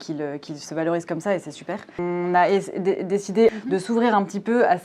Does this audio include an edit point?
yes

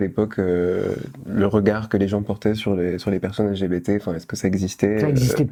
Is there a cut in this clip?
no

